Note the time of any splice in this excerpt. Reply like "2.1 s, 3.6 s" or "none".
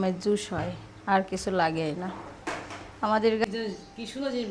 3.4 s